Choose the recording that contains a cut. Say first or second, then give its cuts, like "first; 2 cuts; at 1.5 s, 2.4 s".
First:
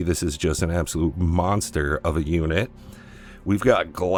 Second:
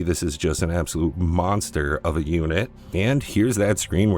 second; 1 cut; at 2.9 s